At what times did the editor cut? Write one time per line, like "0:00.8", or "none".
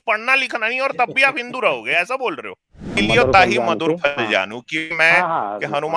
0:02.9